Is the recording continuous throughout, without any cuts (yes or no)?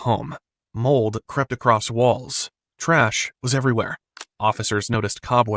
no